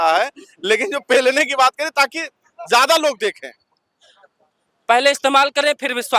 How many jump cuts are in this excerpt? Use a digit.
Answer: 0